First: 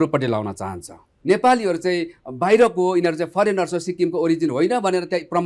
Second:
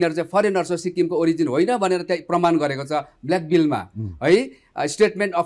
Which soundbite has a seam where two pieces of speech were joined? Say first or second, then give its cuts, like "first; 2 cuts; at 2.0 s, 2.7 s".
first; 1 cut; at 1.1 s